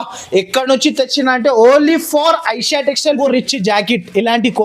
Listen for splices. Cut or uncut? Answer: cut